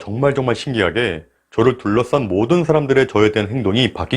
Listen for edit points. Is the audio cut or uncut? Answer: uncut